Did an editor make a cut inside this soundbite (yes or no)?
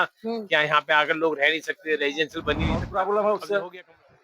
yes